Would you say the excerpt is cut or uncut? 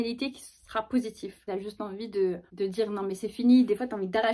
cut